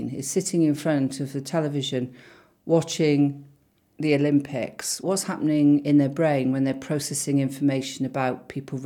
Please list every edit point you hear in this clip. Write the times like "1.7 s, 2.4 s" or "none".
5.0 s